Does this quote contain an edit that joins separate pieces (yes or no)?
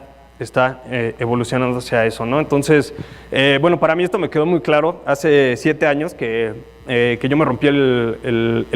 yes